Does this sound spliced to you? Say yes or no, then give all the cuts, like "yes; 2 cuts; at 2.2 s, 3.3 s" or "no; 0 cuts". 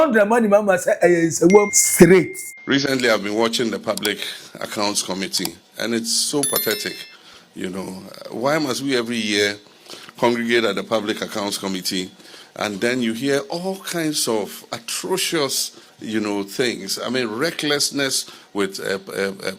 yes; 1 cut; at 1.8 s